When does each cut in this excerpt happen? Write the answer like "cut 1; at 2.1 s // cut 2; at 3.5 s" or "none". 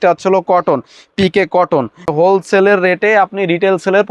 cut 1; at 2.1 s